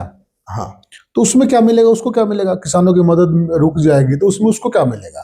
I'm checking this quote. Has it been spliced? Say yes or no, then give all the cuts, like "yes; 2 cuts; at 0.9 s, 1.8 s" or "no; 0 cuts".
no; 0 cuts